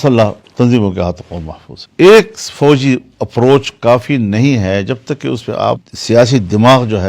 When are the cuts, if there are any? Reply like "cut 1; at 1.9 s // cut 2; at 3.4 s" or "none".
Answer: cut 1; at 1.9 s